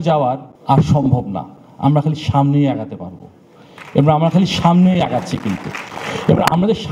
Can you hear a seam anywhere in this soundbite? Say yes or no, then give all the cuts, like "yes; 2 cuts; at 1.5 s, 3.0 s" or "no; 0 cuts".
no; 0 cuts